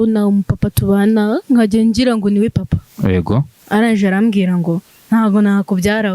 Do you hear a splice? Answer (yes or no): yes